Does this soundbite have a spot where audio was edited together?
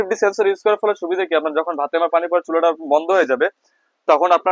no; 0 cuts

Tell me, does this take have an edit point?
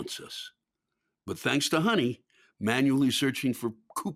no; 0 cuts

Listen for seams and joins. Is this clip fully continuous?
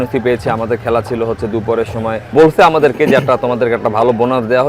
no; 1 cut; at 2.3 s

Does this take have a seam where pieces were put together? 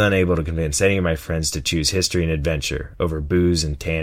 no; 0 cuts

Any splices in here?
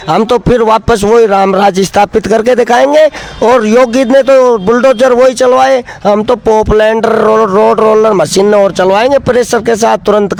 no; 0 cuts

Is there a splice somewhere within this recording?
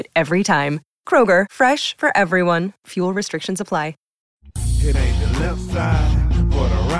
yes; 1 cut; at 4.3 s

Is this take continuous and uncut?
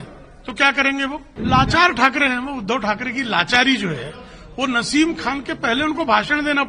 no; 1 cut; at 1.3 s

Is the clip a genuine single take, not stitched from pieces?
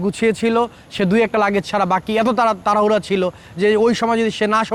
yes; 0 cuts

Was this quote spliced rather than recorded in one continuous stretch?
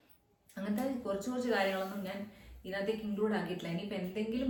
no; 0 cuts

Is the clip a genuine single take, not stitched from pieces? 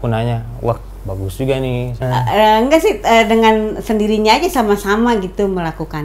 no; 1 cut; at 2.0 s

